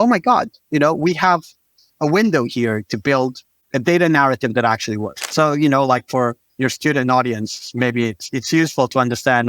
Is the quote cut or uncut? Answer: cut